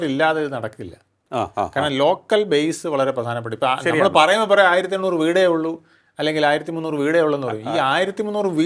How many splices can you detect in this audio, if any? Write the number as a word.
zero